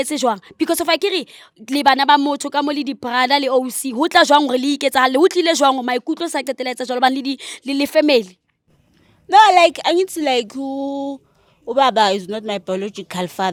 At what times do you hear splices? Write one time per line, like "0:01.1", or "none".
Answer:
none

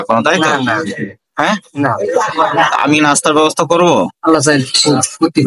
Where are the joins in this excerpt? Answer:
0:04.1

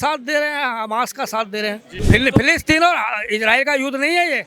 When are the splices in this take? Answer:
0:01.9

